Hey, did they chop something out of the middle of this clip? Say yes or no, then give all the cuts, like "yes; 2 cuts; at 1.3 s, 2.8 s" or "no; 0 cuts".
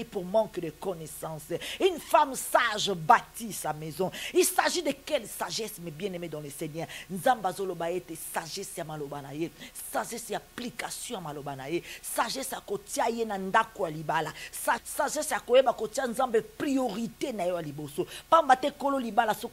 yes; 1 cut; at 14.8 s